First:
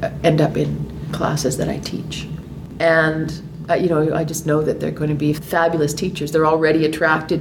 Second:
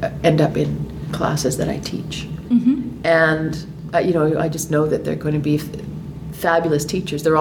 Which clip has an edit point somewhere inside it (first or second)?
first